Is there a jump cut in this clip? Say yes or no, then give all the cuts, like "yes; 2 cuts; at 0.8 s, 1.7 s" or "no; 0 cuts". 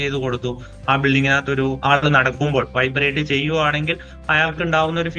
yes; 1 cut; at 1.8 s